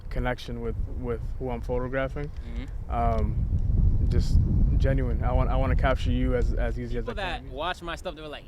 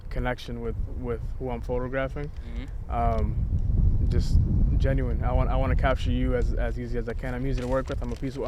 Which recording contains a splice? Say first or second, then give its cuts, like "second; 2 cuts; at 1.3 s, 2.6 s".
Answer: first; 1 cut; at 7.1 s